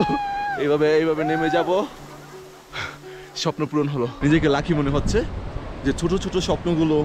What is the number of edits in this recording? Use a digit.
1